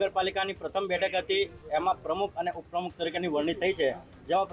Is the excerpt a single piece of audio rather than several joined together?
yes; 0 cuts

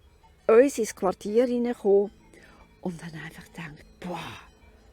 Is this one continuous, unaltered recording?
yes; 0 cuts

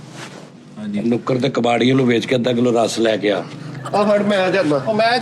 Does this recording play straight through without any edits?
yes; 0 cuts

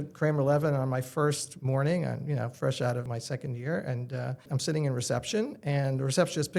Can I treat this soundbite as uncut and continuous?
no; 2 cuts; at 3.1 s, 4.5 s

